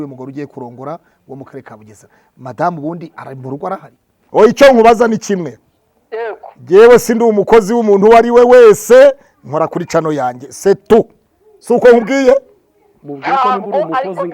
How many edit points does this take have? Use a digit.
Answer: 1